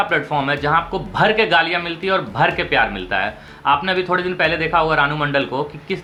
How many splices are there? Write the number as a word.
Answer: zero